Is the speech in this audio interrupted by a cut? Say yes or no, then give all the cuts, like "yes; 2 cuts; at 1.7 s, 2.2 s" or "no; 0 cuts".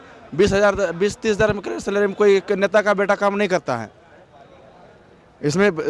no; 0 cuts